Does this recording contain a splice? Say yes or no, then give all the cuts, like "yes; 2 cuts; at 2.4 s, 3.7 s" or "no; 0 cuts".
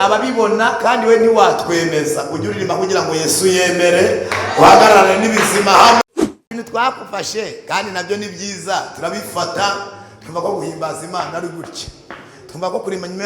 yes; 1 cut; at 6.0 s